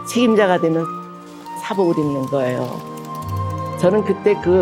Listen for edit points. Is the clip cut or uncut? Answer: uncut